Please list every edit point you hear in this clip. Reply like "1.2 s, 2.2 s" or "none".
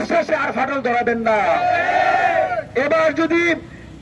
none